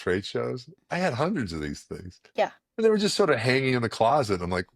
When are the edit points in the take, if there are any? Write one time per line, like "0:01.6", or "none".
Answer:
none